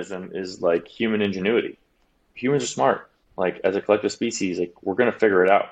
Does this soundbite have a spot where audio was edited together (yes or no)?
no